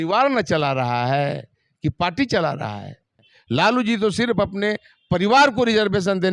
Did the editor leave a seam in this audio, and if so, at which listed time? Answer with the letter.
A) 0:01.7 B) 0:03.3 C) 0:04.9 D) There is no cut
B